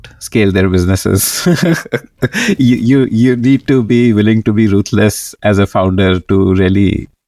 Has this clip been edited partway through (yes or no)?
no